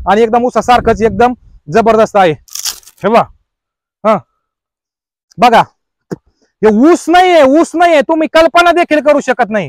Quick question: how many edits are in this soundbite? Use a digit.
1